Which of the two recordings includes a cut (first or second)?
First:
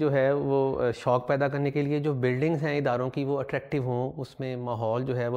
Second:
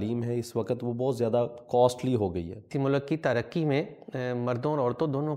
second